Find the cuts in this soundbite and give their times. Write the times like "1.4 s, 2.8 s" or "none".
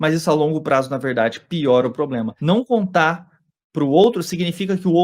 2.3 s